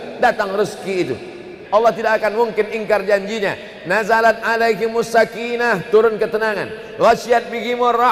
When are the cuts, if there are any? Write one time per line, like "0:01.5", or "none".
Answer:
0:01.5